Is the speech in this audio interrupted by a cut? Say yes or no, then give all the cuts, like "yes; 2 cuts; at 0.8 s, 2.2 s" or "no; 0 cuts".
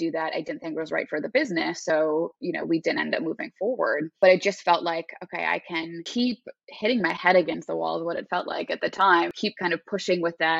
yes; 3 cuts; at 4.1 s, 6.4 s, 9.4 s